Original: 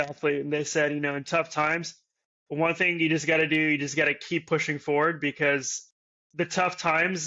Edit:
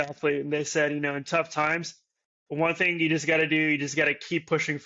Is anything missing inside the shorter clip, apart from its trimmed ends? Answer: no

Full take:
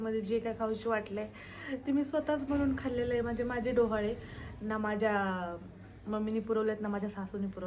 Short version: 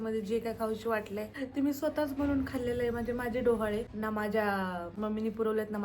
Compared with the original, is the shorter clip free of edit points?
no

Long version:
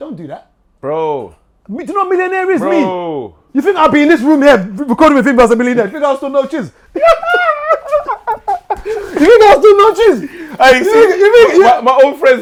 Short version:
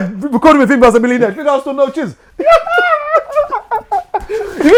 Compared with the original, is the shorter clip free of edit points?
yes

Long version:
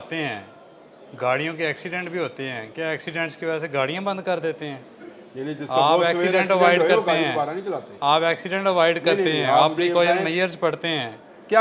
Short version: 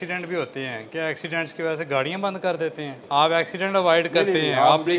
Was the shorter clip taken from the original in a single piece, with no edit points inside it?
no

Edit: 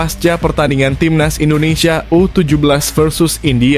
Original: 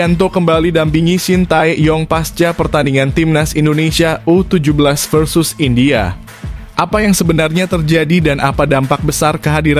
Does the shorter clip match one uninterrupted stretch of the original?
yes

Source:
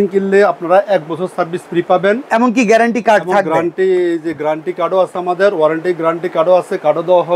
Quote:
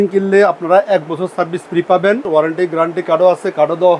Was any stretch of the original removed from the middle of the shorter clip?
yes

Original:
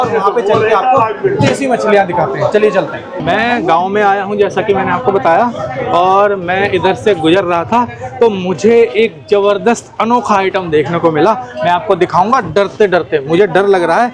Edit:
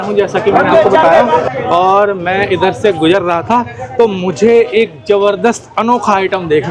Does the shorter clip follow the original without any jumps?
yes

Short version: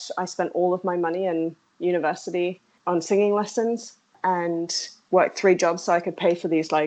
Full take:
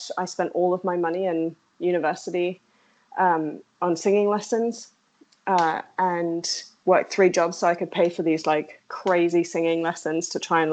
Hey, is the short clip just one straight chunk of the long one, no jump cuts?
no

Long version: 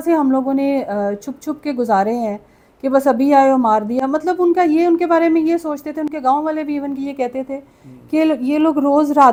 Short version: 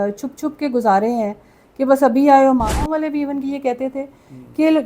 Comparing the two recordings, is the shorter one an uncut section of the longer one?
no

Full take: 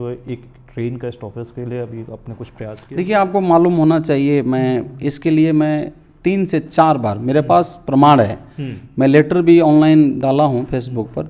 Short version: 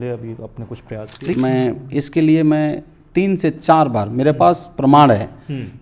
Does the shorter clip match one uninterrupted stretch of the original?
no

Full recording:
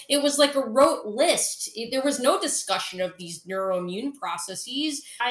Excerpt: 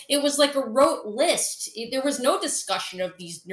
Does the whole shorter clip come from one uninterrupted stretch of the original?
yes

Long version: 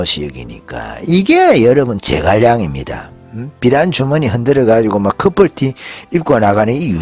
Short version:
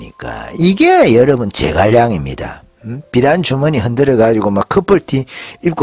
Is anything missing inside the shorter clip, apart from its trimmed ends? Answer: no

